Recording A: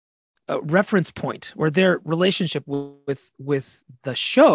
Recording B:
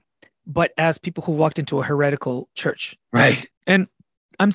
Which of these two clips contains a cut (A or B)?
B